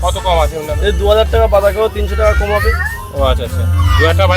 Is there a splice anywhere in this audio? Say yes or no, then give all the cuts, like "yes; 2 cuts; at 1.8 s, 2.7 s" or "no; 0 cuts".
no; 0 cuts